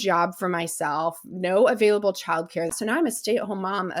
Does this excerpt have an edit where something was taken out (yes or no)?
yes